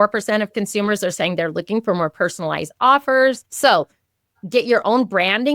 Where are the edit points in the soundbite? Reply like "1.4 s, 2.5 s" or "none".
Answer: 3.5 s